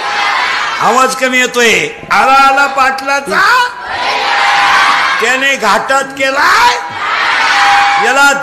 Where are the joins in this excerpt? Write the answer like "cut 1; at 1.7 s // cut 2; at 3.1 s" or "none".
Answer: none